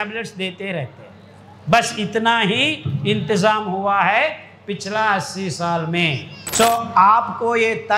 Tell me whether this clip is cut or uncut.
cut